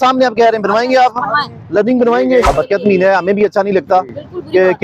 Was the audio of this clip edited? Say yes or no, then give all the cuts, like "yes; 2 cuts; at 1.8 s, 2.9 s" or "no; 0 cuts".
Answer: yes; 1 cut; at 2.4 s